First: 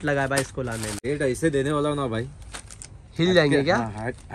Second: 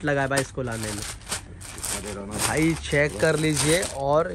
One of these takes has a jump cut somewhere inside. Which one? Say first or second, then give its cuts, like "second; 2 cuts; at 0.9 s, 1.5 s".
first; 1 cut; at 1.0 s